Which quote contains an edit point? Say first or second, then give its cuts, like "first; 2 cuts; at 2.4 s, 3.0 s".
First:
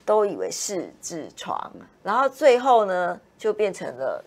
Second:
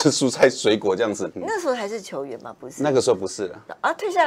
second; 1 cut; at 1.3 s